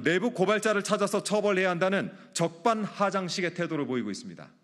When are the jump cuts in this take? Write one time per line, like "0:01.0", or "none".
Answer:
none